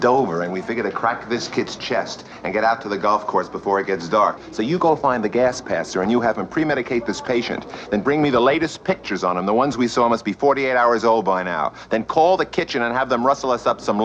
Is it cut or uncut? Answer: cut